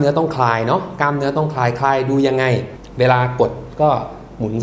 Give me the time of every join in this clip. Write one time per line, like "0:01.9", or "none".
0:02.8

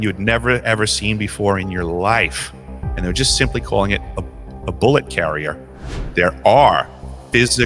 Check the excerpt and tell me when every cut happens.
0:06.0

